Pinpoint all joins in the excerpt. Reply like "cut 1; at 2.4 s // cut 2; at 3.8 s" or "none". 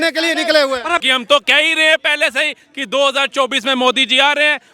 cut 1; at 1.0 s